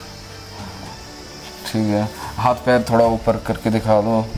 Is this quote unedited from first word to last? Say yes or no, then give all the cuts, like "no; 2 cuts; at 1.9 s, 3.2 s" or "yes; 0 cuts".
yes; 0 cuts